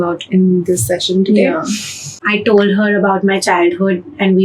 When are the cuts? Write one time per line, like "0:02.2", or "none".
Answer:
0:02.1